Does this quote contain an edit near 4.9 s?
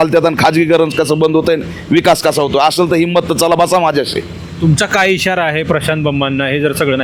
no; 0 cuts

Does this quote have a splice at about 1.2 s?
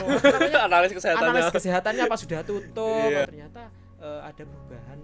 no; 1 cut; at 3.2 s

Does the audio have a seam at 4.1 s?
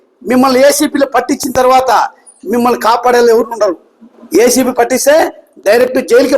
yes; 1 cut; at 4.1 s

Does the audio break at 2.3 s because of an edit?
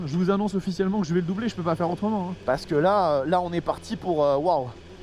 yes; 1 cut; at 2.3 s

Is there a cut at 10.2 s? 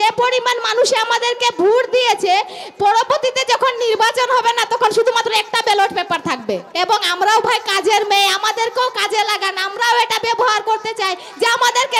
no; 1 cut; at 6.7 s

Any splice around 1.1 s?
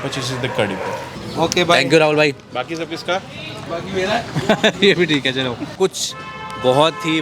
yes; 2 cuts; at 1.1 s, 5.7 s

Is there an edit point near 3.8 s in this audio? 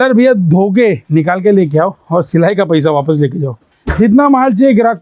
yes; 2 cuts; at 1.0 s, 3.8 s

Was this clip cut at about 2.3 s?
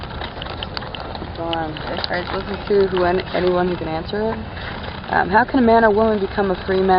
no; 1 cut; at 5.5 s

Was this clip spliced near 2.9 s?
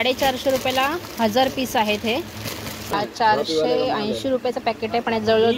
yes; 1 cut; at 2.9 s

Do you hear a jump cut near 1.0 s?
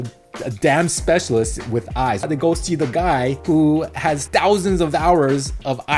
no; 3 cuts; at 2.3 s, 3.4 s, 4.2 s

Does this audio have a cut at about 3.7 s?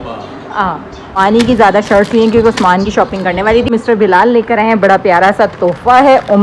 yes; 2 cuts; at 1.2 s, 3.7 s

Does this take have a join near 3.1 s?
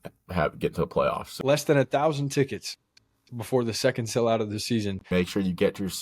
no; 2 cuts; at 1.3 s, 5.1 s

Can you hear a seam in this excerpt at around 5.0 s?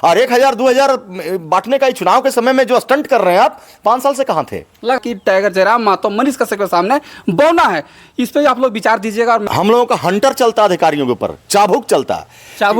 yes; 2 cuts; at 5.0 s, 9.4 s

